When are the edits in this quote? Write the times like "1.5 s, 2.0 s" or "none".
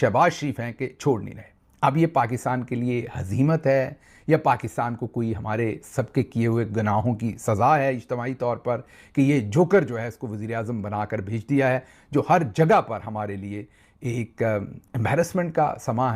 none